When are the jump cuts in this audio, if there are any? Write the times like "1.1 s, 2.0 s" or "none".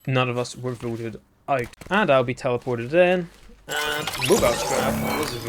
1.8 s